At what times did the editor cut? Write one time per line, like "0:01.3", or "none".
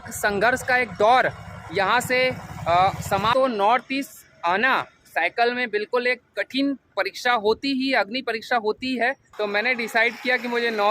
0:03.3
0:09.2